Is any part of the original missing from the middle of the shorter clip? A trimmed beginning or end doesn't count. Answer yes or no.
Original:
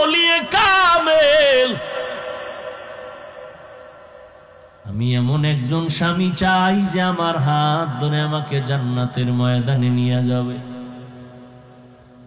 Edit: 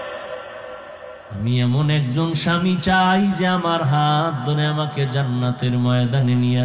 yes